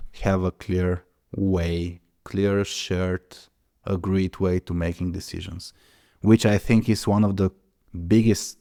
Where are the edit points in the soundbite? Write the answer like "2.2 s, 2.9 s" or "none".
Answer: none